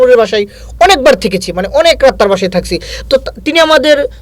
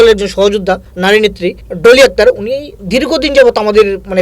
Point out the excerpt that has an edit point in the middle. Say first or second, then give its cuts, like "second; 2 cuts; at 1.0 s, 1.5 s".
second; 2 cuts; at 0.9 s, 1.7 s